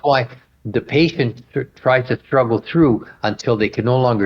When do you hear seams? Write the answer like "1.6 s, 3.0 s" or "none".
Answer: none